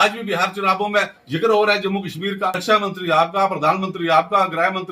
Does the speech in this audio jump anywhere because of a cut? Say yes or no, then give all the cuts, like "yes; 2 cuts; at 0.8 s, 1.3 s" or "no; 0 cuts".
yes; 1 cut; at 2.6 s